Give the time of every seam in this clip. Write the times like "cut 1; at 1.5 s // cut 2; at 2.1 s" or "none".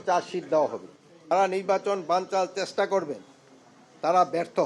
cut 1; at 1.3 s